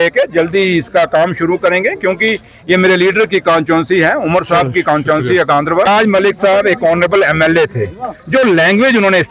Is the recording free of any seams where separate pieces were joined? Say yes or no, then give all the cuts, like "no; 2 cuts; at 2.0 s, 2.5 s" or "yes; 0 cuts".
no; 1 cut; at 5.9 s